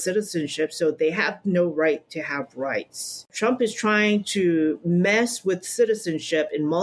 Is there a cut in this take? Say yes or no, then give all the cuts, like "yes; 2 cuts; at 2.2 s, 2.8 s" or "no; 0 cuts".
yes; 1 cut; at 3.3 s